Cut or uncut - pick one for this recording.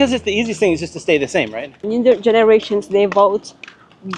cut